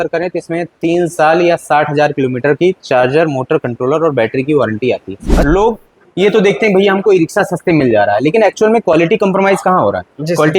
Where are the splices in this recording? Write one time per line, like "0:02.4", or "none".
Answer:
0:05.4